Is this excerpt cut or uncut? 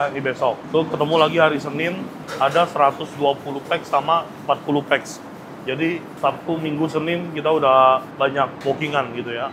uncut